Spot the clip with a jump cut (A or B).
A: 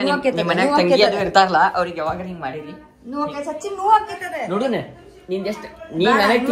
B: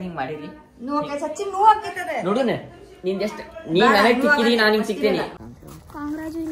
B